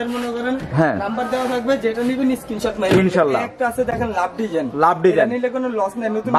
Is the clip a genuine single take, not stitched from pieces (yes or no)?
yes